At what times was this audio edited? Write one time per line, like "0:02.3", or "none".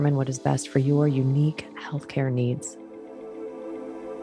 0:02.7